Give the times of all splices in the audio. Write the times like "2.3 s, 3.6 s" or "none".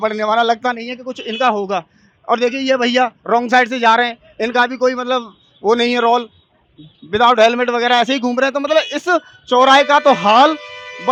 none

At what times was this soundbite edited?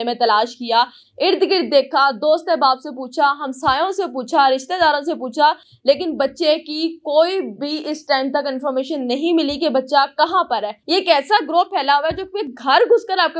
10.7 s

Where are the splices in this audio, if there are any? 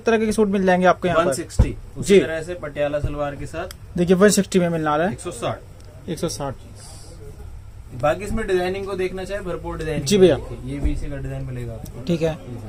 none

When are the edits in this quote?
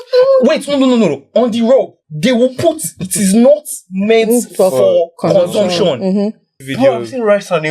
2.0 s, 6.6 s

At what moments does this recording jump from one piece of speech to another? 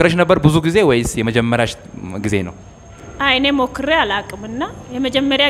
none

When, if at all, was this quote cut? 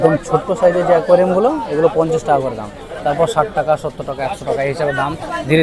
none

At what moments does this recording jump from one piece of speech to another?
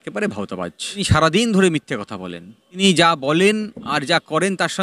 1.0 s, 2.8 s

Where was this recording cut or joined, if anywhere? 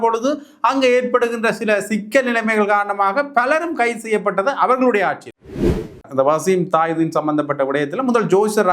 5.7 s

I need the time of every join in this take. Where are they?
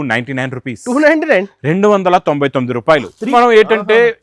3.3 s

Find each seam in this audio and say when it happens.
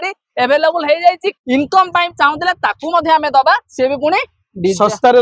1.3 s

